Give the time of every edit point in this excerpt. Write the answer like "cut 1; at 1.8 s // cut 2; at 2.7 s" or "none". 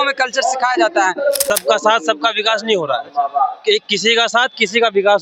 cut 1; at 1.4 s